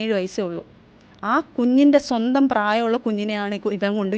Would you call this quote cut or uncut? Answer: uncut